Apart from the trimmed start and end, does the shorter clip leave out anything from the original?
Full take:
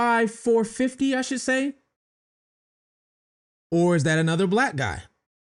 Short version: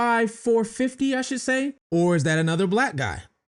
yes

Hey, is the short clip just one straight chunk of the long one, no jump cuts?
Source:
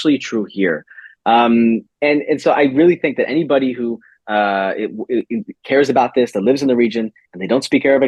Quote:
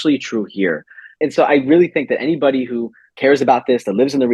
no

